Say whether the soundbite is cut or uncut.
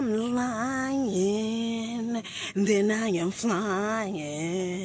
uncut